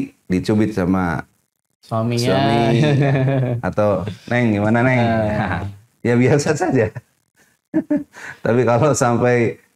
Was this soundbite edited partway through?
no; 0 cuts

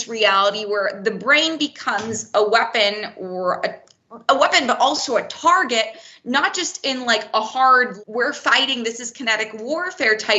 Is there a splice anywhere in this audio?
yes; 1 cut; at 7.9 s

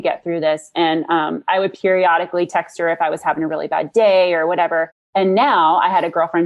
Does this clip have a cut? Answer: no; 0 cuts

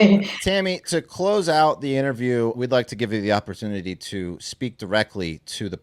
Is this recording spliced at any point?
yes; 2 cuts; at 0.7 s, 2.6 s

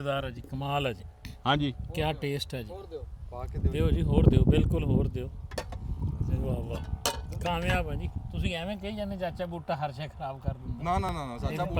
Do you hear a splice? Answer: no; 0 cuts

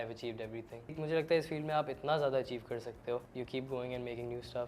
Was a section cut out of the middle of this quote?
yes; 2 cuts; at 1.0 s, 3.3 s

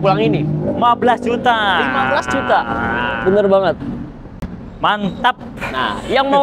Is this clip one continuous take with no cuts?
yes; 0 cuts

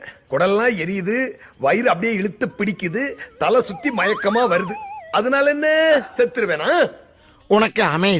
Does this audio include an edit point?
no; 0 cuts

